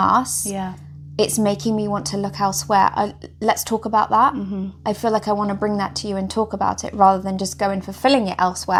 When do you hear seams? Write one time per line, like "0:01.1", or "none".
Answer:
none